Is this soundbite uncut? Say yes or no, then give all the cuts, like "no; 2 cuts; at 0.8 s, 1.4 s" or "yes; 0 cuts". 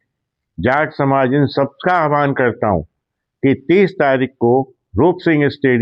yes; 0 cuts